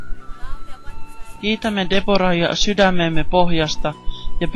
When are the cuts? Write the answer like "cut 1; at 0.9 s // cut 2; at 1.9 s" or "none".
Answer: cut 1; at 0.9 s